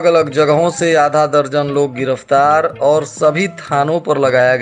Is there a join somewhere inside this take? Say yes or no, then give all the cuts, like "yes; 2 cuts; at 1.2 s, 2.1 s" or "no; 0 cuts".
no; 0 cuts